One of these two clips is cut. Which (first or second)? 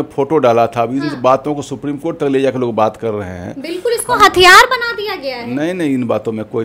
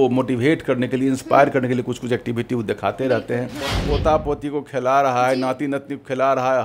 second